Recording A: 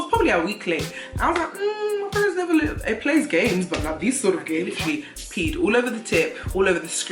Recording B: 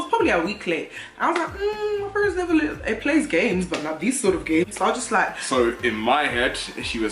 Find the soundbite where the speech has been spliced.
A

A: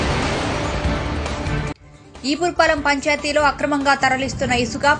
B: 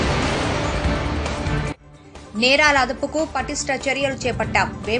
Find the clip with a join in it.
A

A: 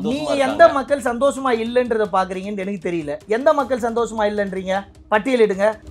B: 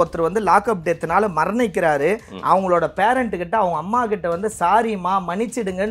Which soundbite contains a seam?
A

